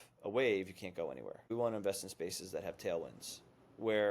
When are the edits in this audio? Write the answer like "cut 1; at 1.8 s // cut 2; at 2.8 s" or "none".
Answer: cut 1; at 1.5 s